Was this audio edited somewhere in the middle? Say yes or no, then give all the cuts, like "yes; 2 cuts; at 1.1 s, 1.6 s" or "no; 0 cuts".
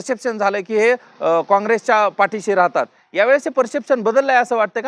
no; 0 cuts